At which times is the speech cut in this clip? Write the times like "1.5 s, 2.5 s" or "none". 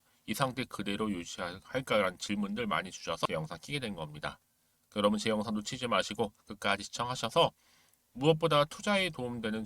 3.3 s